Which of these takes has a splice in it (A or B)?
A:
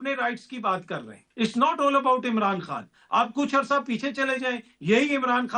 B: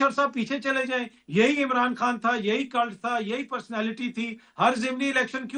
A